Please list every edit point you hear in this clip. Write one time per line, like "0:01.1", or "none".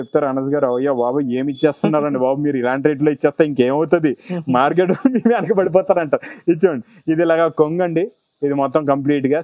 none